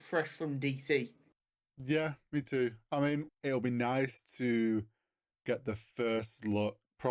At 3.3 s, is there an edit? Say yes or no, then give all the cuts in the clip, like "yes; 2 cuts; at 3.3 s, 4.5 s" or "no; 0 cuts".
yes; 1 cut; at 3.3 s